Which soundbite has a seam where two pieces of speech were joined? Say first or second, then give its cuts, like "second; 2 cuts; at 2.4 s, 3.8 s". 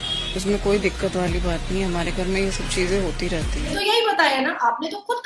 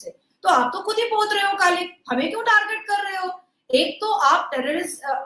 first; 1 cut; at 3.7 s